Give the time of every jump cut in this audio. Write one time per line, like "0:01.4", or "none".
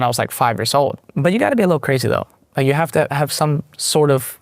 0:01.0

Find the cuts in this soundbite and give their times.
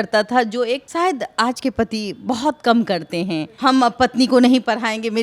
0:00.9
0:03.5

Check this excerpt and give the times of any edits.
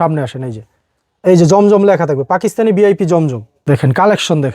0:03.5

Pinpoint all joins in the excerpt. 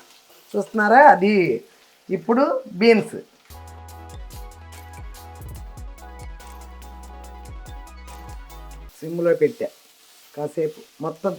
0:08.9

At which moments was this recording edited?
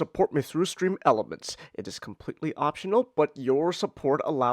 none

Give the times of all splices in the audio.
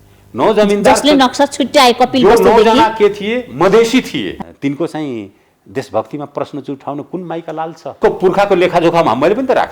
0:04.4
0:08.0

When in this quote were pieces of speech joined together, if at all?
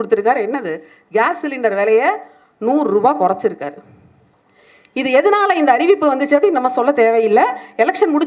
none

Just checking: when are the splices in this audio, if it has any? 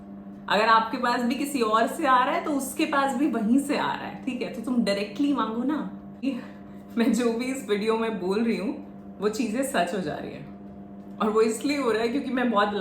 0:06.2

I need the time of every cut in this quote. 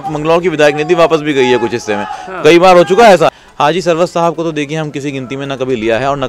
0:03.3

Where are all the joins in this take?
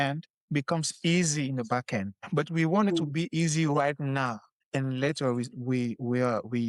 none

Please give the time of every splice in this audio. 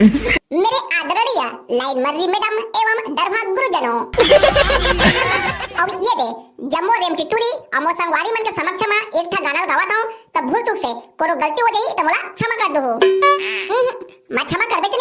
none

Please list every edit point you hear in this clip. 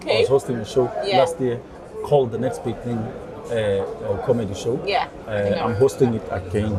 none

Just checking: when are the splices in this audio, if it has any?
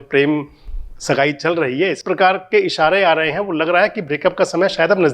0:02.0

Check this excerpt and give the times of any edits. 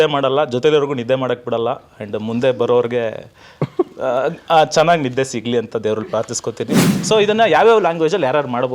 0:06.9

